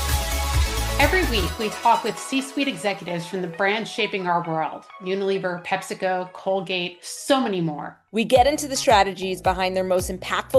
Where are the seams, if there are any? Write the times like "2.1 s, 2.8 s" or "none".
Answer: none

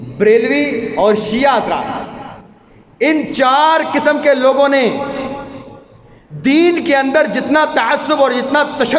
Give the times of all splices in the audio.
none

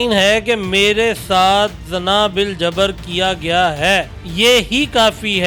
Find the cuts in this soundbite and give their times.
4.2 s

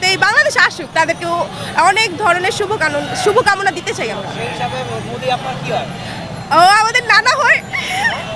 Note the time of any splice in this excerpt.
none

